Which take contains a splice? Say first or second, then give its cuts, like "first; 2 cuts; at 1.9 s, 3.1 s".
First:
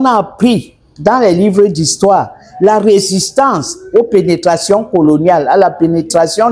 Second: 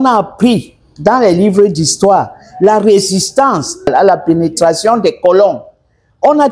second; 1 cut; at 3.9 s